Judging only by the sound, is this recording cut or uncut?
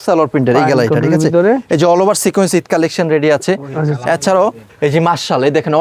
uncut